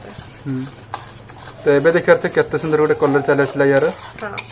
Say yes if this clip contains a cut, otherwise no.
no